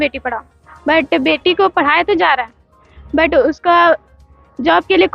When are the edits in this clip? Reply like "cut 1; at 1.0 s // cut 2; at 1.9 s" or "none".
none